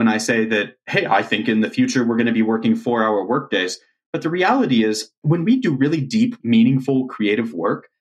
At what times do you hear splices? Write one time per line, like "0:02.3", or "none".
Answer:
0:05.1
0:06.4